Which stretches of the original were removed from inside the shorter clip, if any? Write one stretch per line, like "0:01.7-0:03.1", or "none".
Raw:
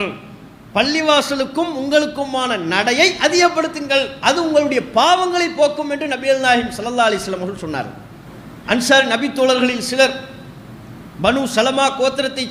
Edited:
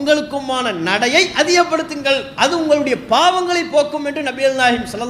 none